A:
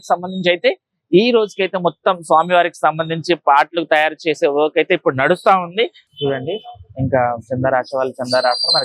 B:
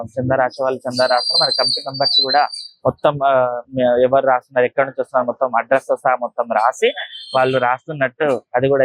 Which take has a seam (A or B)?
A